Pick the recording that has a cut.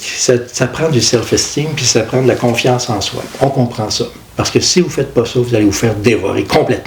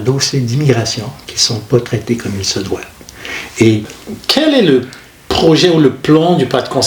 second; 1 cut; at 3.9 s

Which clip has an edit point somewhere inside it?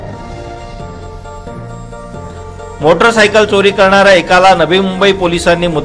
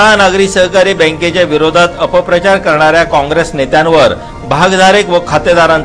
first; 1 cut; at 1.7 s

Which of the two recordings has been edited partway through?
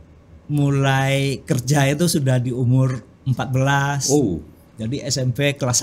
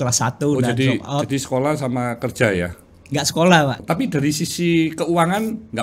second; 1 cut; at 3.8 s

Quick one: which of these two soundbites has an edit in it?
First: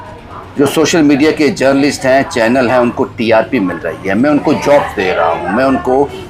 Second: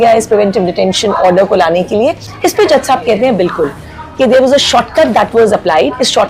second; 1 cut; at 2.3 s

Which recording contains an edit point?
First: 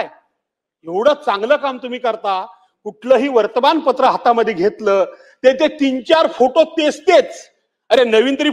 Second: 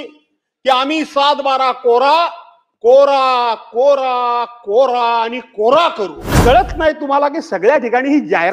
second; 1 cut; at 6.3 s

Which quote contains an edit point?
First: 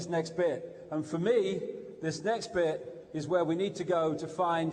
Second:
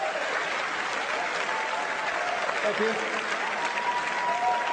first; 1 cut; at 2.0 s

